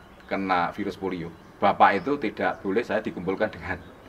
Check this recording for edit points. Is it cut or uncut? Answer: cut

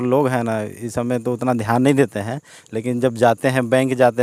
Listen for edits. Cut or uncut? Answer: uncut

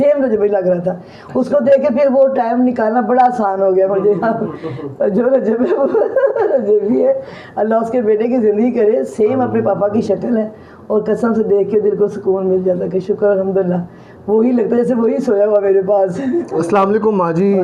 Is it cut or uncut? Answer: uncut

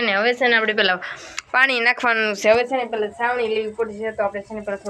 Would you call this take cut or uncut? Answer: uncut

